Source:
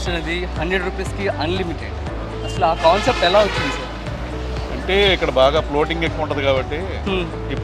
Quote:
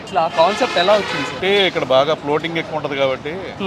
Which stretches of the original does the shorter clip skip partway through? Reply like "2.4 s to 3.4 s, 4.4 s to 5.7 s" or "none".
3.8 s to 4.8 s